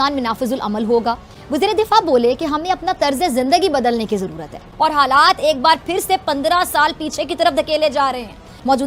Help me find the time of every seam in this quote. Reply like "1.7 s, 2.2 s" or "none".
none